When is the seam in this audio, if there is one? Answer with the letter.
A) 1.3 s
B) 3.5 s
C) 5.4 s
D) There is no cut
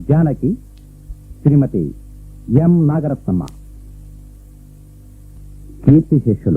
C